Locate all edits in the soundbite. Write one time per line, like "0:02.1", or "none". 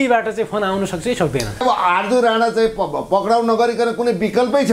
0:01.6